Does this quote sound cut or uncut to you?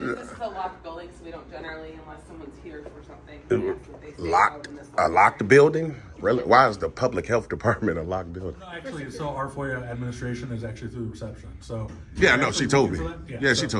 cut